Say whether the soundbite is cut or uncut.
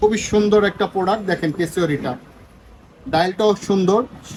uncut